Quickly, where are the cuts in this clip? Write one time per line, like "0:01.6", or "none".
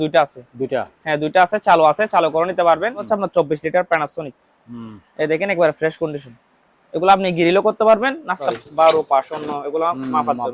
0:03.1
0:08.5